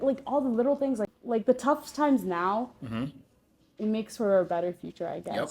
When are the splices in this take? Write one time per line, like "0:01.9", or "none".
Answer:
0:01.2